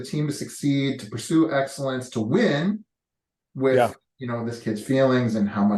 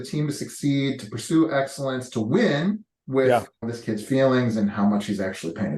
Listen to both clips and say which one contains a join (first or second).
second